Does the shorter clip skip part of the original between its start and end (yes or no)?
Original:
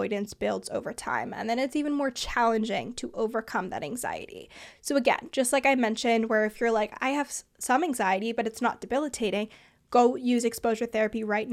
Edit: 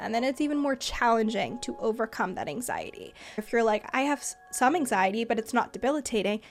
yes